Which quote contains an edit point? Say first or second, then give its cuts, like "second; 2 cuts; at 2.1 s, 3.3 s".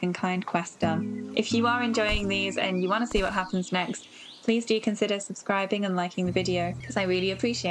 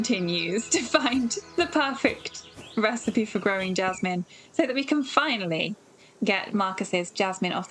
first; 2 cuts; at 1.2 s, 6.8 s